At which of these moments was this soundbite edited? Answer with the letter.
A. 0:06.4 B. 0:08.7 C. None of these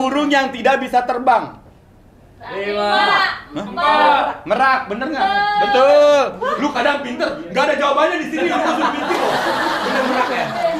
C